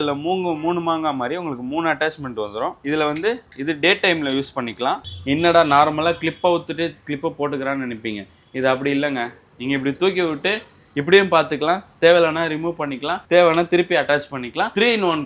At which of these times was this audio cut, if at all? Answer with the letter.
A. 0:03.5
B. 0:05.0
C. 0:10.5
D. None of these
B